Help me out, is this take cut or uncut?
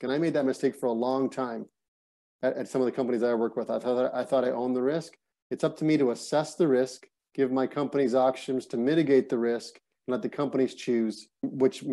uncut